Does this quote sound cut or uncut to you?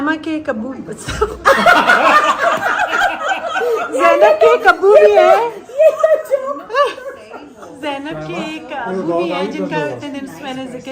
uncut